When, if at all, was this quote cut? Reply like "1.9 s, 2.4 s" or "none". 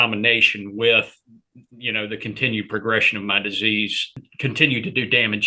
4.0 s

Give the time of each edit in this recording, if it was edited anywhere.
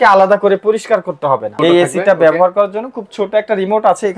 1.6 s

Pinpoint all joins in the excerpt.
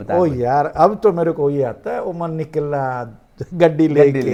none

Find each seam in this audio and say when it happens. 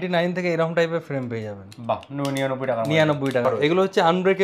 3.4 s

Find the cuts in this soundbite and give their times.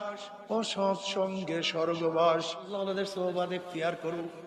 2.7 s

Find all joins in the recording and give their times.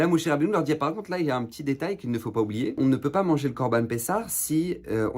2.8 s

